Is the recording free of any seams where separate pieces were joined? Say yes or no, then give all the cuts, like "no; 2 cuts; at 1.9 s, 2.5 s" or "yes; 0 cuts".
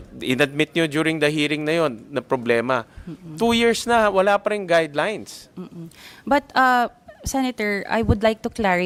yes; 0 cuts